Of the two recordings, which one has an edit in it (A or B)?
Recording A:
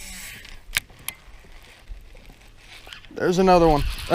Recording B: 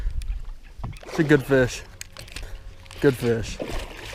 A